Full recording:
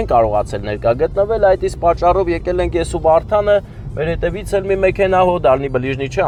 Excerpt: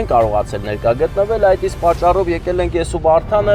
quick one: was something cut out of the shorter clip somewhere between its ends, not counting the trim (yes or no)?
no